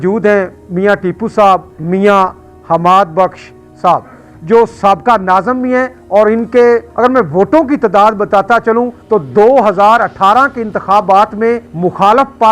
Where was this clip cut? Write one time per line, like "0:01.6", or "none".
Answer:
0:01.8
0:06.0
0:06.9
0:09.0
0:11.7